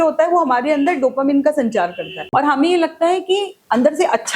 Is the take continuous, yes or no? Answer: no